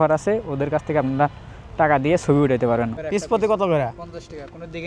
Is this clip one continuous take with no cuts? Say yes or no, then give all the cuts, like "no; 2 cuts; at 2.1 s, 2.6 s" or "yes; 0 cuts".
no; 1 cut; at 3.0 s